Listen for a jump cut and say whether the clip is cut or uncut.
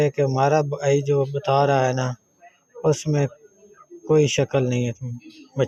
uncut